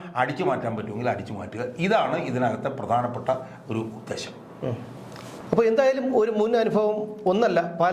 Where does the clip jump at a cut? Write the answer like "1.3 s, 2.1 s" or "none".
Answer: none